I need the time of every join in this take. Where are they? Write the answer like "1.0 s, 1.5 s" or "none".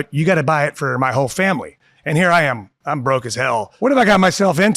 3.7 s